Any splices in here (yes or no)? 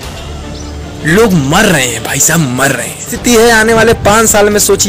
yes